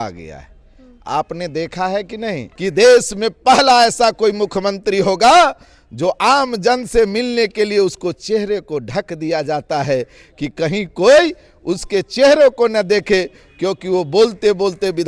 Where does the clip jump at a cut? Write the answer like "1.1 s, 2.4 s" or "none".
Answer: 2.5 s